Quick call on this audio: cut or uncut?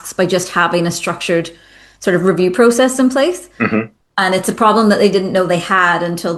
uncut